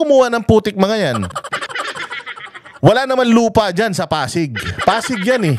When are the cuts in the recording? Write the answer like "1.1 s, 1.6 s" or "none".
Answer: none